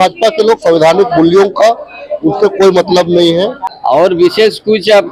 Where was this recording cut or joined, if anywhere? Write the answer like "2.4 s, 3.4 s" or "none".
3.7 s